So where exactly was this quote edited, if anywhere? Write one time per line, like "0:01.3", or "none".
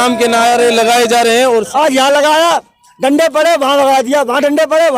0:01.7